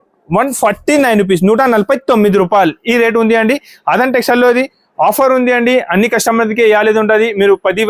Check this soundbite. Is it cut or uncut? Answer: uncut